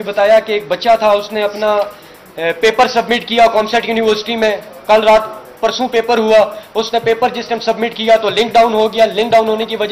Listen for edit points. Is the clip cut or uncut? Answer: uncut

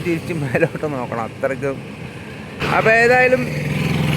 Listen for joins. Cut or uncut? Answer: cut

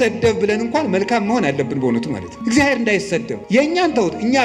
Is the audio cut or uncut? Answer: cut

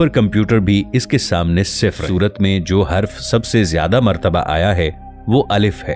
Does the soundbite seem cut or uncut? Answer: cut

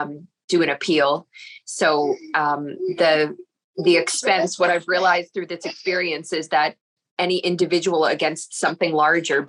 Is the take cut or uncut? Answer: uncut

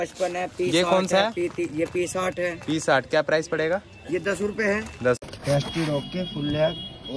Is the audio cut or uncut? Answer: cut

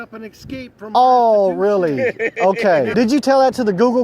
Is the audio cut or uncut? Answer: cut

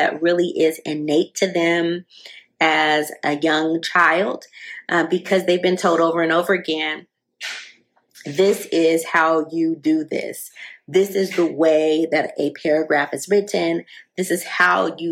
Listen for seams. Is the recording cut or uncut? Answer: uncut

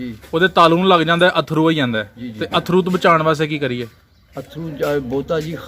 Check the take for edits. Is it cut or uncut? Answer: uncut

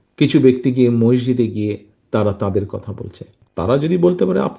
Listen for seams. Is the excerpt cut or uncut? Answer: uncut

